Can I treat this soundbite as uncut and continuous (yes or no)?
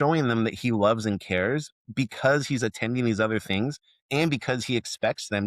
no